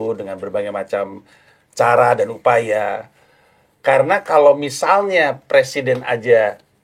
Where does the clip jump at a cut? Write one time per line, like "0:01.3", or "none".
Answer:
none